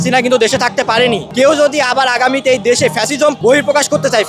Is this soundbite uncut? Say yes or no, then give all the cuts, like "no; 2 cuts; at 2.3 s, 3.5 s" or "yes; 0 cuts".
no; 2 cuts; at 1.3 s, 3.4 s